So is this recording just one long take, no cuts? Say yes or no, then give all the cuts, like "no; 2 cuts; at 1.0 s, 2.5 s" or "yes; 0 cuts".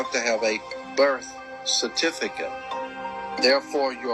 no; 1 cut; at 2.9 s